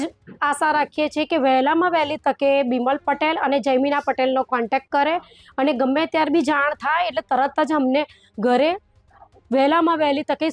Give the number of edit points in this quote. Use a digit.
0